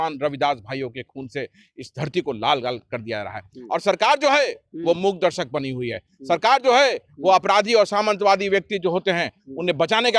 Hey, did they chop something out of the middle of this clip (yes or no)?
no